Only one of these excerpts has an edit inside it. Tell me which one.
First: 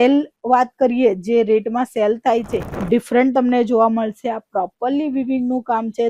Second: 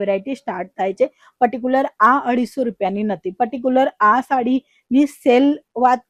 first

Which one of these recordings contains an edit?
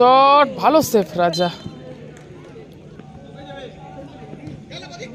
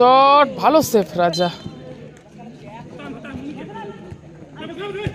second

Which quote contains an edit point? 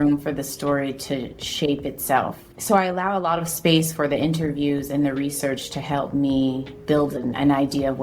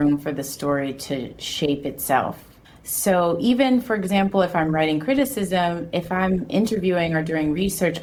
first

